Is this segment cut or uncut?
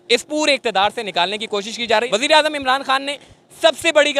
cut